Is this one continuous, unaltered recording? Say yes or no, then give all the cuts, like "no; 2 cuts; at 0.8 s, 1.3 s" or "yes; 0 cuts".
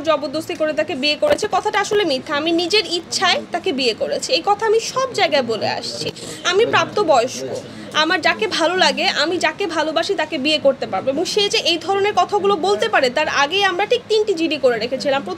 yes; 0 cuts